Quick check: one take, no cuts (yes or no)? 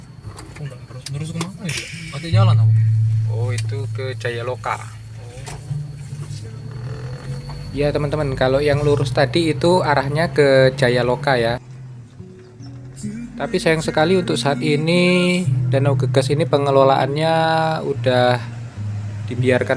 no